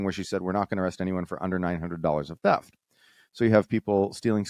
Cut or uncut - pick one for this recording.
uncut